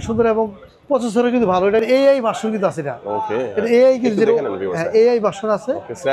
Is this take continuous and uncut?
yes; 0 cuts

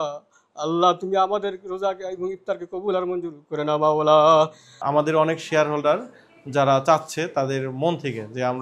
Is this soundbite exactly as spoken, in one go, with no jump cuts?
no; 1 cut; at 4.8 s

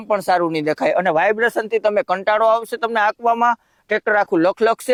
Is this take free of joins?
yes; 0 cuts

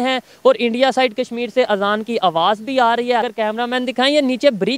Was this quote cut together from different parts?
yes; 1 cut; at 3.3 s

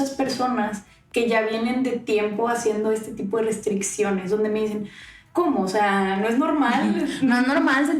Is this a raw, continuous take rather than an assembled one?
yes; 0 cuts

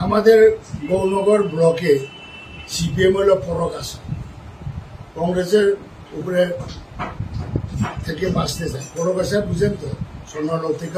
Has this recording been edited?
no; 0 cuts

